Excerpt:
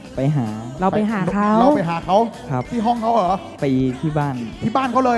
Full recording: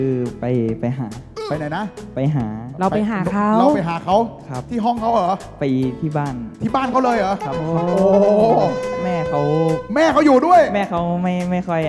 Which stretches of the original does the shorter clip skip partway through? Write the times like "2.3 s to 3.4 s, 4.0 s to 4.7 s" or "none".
none